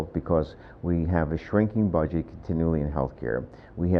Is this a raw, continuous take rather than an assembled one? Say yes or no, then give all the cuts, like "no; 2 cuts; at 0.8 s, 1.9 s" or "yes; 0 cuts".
no; 1 cut; at 1.1 s